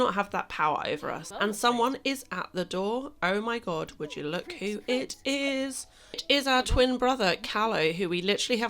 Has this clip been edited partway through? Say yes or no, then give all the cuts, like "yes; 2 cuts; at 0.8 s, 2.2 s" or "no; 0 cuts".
yes; 1 cut; at 1.2 s